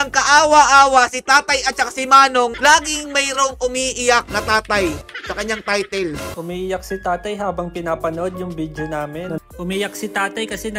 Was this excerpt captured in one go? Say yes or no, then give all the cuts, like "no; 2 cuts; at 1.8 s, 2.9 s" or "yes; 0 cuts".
yes; 0 cuts